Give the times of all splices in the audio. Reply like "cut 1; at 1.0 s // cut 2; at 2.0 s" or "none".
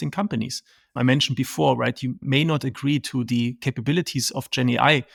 none